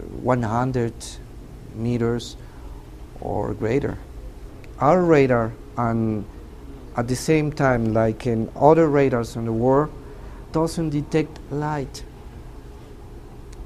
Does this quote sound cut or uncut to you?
uncut